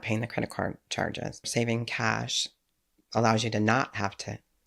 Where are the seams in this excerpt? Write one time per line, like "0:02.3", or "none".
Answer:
0:01.5